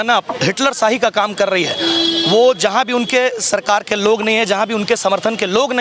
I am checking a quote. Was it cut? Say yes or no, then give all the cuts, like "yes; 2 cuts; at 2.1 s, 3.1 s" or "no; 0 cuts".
no; 0 cuts